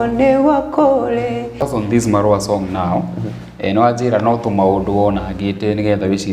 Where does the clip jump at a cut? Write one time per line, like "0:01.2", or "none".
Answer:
0:01.6